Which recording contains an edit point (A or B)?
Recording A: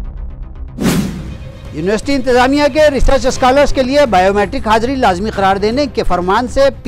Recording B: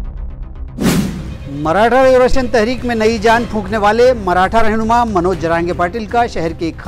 B